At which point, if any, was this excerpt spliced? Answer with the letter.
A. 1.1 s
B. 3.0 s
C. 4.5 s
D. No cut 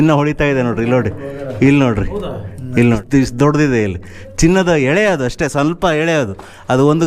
B